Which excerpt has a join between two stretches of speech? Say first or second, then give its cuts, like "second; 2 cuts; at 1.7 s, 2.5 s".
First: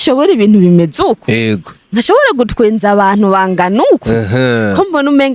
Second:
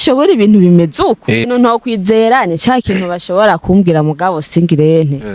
second; 1 cut; at 1.5 s